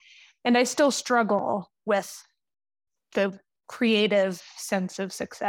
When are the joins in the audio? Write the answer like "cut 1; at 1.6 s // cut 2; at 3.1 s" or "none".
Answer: cut 1; at 2.8 s